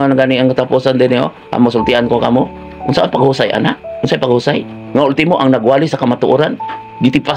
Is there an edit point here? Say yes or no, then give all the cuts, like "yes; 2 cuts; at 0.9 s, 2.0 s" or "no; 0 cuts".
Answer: yes; 1 cut; at 5.0 s